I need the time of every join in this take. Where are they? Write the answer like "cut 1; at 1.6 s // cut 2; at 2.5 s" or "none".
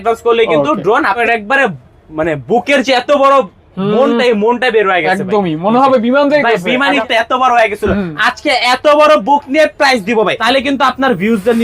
cut 1; at 1.2 s // cut 2; at 7.0 s // cut 3; at 10.4 s